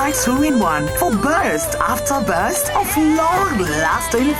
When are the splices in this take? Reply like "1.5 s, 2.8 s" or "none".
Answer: none